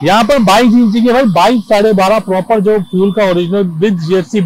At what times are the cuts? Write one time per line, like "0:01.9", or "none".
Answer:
none